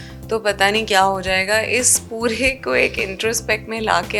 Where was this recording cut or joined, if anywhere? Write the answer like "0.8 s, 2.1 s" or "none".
none